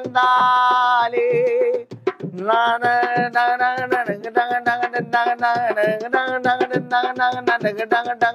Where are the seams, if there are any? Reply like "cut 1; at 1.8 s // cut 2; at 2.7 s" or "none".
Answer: none